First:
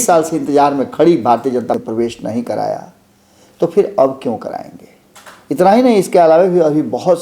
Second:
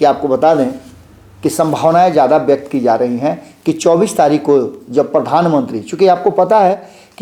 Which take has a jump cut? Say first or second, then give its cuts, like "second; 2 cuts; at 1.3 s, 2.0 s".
first; 1 cut; at 1.8 s